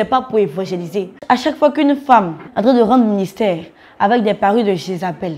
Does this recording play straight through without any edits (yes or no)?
no